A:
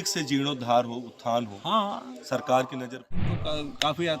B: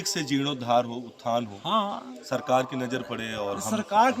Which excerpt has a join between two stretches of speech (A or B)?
A